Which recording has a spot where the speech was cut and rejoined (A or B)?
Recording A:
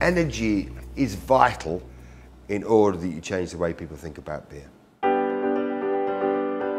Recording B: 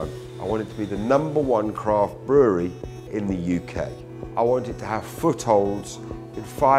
A